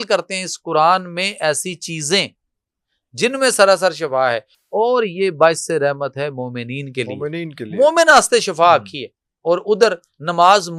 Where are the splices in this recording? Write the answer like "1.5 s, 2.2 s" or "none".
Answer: none